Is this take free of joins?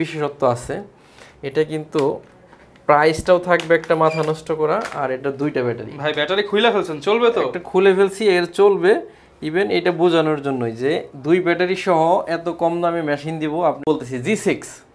no; 1 cut; at 13.8 s

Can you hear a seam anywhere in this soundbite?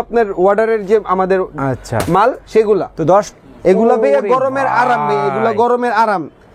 yes; 1 cut; at 3.3 s

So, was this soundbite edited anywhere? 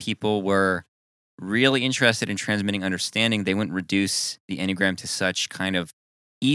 no; 0 cuts

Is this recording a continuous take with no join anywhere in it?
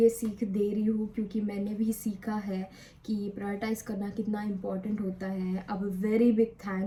yes; 0 cuts

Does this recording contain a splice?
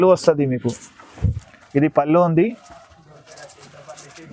no; 0 cuts

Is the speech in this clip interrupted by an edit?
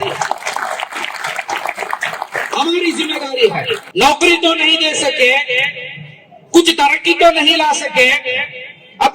yes; 1 cut; at 3.9 s

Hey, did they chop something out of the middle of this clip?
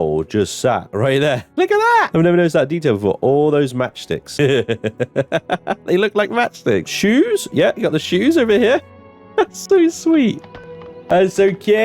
yes; 3 cuts; at 2.1 s, 4.3 s, 6.9 s

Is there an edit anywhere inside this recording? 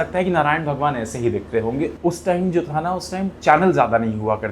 yes; 1 cut; at 1.9 s

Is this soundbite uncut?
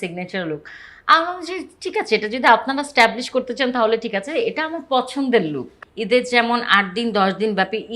no; 1 cut; at 5.8 s

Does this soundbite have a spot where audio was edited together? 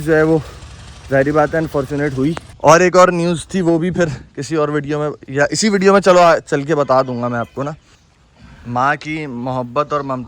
yes; 2 cuts; at 2.5 s, 7.8 s

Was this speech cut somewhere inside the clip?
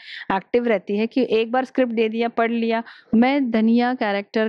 yes; 1 cut; at 2.9 s

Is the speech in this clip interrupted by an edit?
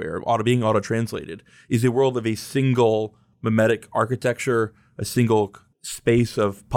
no; 0 cuts

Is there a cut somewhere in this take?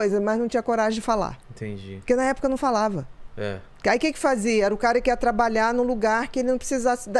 no; 0 cuts

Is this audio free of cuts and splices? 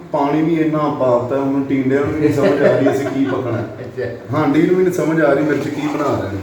yes; 0 cuts

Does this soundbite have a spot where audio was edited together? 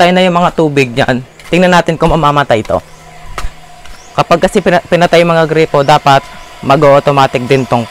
no; 0 cuts

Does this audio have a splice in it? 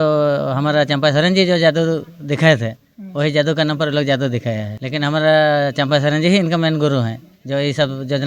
no; 0 cuts

